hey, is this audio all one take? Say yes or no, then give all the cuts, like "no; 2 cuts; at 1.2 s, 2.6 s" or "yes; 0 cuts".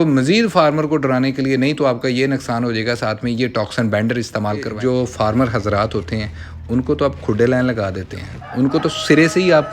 no; 1 cut; at 4.7 s